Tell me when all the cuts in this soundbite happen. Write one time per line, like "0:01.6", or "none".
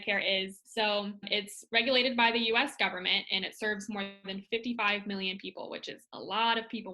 0:01.3